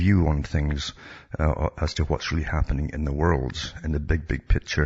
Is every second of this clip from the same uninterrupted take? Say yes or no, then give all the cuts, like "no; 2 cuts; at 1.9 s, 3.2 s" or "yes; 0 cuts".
yes; 0 cuts